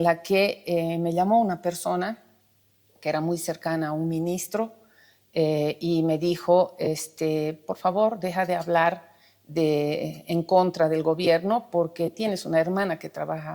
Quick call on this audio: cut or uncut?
uncut